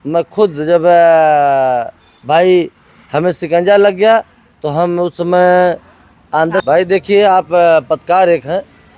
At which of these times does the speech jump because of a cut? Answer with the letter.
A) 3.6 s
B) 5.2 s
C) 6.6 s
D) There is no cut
C